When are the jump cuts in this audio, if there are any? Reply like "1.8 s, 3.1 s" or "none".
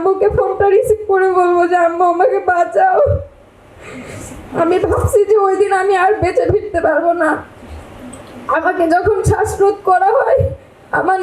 none